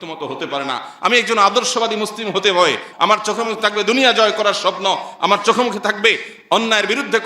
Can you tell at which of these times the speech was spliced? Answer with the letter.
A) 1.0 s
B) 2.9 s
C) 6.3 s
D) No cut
B